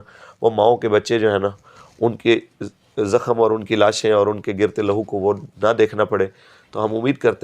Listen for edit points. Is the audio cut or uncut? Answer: uncut